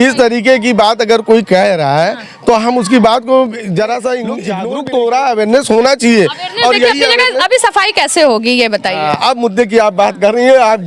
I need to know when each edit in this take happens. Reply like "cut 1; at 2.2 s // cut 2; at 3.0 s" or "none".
cut 1; at 4.5 s